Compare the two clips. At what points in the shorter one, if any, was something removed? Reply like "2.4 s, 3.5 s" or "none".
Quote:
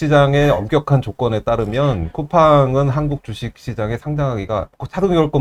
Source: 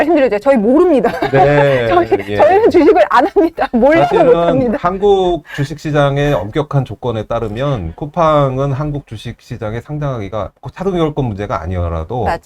none